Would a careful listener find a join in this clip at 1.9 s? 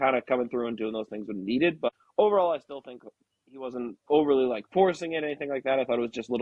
yes; 1 cut; at 1.9 s

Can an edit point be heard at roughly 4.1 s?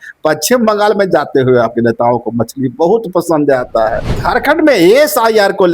yes; 1 cut; at 4.1 s

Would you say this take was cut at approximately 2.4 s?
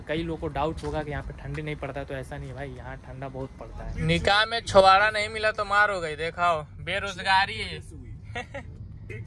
no; 1 cut; at 3.9 s

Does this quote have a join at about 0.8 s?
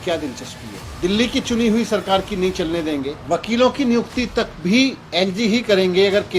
yes; 2 cuts; at 0.8 s, 3.2 s

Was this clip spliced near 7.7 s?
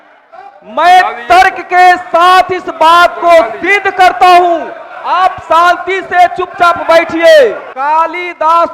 yes; 1 cut; at 7.7 s

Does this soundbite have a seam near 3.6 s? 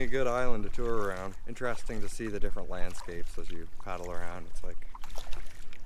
no; 1 cut; at 1.4 s

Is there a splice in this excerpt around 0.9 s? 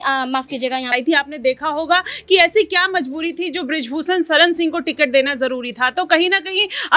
yes; 1 cut; at 0.9 s

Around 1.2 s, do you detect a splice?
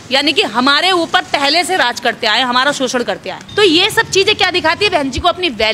no; 1 cut; at 3.3 s

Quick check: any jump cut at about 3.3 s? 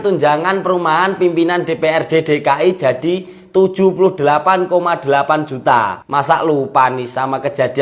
no; 1 cut; at 6.0 s

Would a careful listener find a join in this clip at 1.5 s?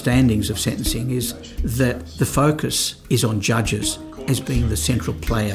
no; 1 cut; at 2.9 s

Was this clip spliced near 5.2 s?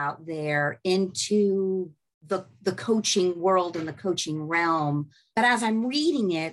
yes; 1 cut; at 5.2 s

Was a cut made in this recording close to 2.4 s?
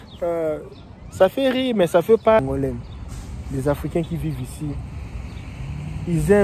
yes; 1 cut; at 2.4 s

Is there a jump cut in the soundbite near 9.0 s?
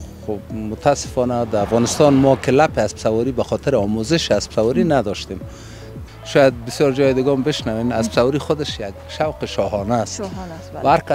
no; 1 cut; at 6.0 s

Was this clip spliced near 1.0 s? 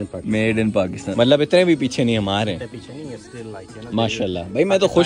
yes; 1 cut; at 1.0 s

